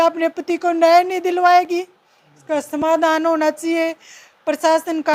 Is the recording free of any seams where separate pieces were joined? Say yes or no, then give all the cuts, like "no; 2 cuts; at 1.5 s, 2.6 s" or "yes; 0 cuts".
yes; 0 cuts